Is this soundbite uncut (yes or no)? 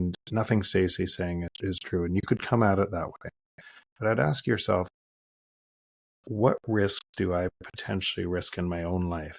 no